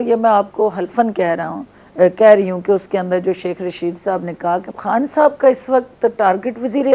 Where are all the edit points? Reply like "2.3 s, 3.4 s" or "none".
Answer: 4.7 s